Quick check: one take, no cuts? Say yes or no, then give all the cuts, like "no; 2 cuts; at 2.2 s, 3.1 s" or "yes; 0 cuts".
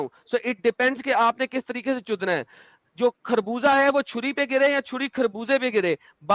yes; 0 cuts